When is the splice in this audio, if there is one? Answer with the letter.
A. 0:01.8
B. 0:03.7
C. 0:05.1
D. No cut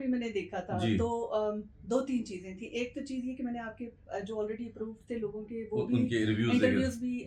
D